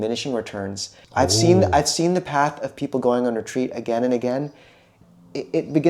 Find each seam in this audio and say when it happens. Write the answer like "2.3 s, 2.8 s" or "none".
0.9 s, 5.0 s